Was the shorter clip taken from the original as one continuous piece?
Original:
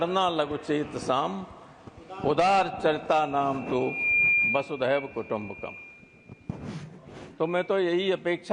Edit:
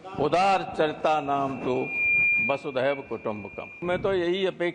no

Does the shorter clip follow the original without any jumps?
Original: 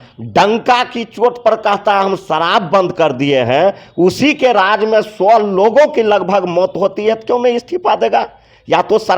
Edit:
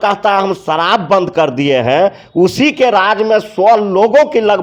yes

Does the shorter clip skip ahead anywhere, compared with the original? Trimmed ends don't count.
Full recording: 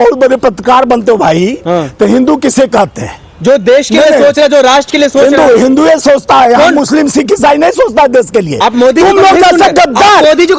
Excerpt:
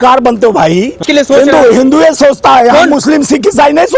yes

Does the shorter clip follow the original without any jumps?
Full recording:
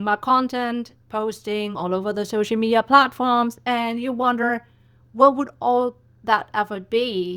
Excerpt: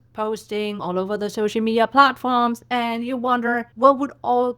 no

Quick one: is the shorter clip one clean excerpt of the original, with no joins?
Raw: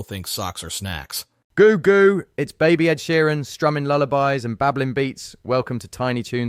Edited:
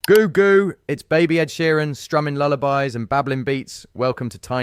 yes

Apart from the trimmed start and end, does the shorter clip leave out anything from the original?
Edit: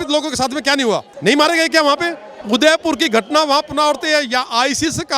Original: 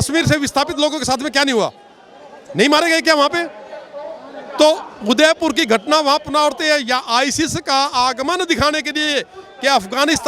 yes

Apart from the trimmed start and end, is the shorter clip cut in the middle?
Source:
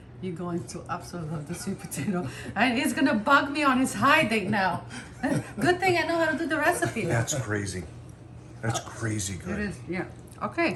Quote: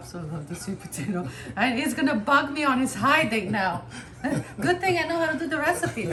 no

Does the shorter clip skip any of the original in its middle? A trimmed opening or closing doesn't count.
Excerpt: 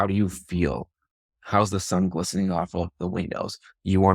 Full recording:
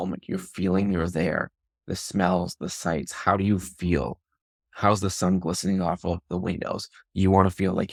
no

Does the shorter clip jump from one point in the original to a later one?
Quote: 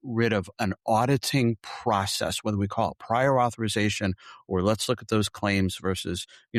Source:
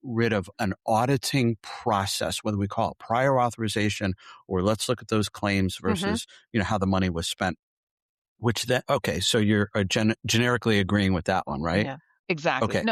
no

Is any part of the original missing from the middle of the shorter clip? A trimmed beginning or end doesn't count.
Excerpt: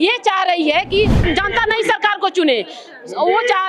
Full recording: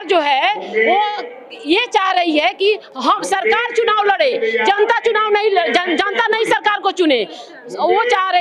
yes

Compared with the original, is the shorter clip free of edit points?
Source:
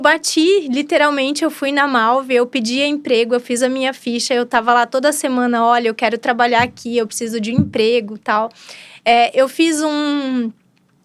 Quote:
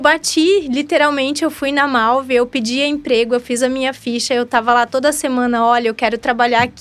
yes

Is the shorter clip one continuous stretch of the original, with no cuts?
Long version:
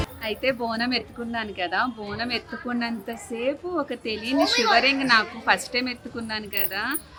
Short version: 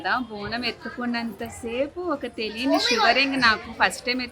yes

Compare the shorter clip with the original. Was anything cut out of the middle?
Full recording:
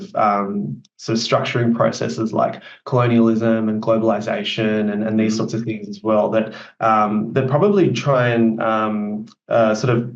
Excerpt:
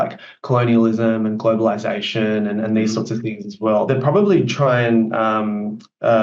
yes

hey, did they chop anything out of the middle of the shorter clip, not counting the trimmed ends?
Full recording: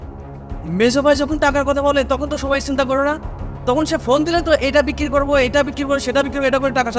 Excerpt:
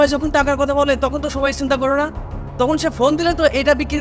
no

